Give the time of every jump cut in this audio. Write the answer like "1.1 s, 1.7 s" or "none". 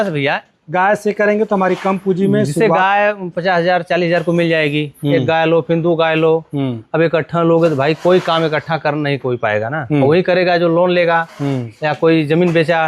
none